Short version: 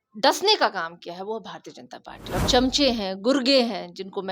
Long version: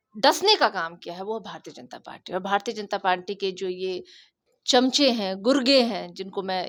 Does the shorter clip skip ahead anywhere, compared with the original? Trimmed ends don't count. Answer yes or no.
yes